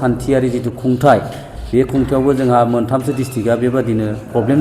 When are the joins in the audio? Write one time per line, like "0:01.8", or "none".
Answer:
none